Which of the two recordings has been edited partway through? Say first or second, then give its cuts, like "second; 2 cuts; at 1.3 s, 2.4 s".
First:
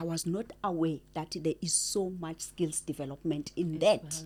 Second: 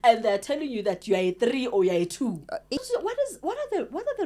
second; 1 cut; at 2.8 s